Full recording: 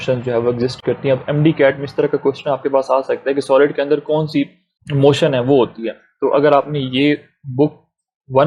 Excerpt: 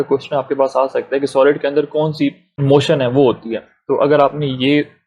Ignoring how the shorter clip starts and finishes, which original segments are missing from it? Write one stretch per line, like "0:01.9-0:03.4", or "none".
0:04.6-0:04.8

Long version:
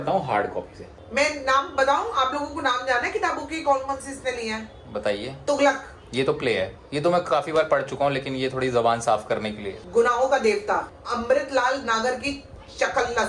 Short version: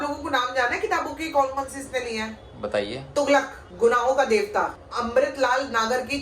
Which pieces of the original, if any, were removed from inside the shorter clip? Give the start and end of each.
0:05.9-0:09.7

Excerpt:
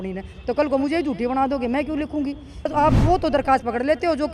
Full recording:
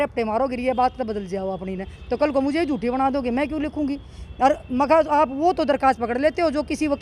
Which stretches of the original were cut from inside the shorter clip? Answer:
0:04.3-0:05.1

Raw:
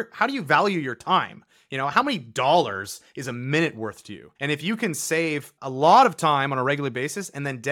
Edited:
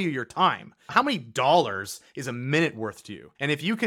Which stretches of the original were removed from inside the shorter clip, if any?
0:01.6-0:01.9

